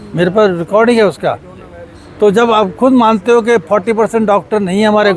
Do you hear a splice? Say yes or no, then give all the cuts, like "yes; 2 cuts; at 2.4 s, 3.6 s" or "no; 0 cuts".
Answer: no; 0 cuts